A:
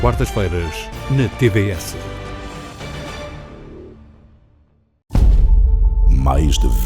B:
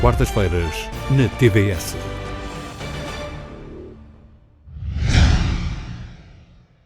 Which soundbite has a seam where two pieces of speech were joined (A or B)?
A